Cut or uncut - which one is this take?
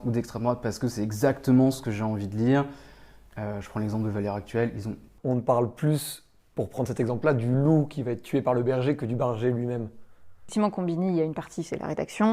cut